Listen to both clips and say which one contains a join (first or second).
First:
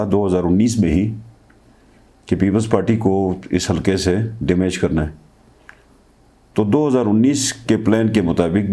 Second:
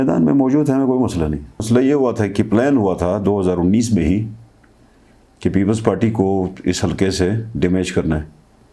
second